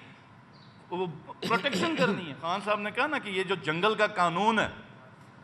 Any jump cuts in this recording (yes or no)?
yes